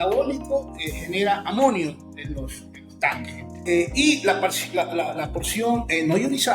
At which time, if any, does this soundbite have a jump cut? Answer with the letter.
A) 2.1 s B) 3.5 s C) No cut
B